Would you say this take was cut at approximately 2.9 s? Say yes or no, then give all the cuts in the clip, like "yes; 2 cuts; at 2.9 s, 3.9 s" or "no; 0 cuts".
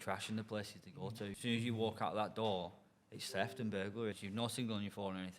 no; 2 cuts; at 1.4 s, 4.2 s